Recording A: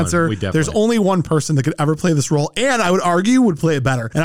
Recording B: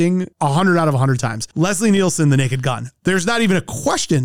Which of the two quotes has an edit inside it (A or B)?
B